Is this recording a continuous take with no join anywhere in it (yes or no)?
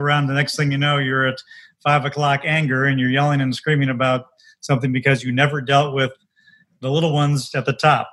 yes